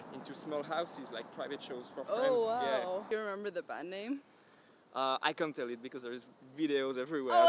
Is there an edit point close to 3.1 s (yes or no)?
yes